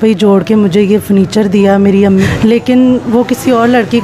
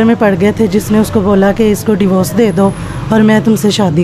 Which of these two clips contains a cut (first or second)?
first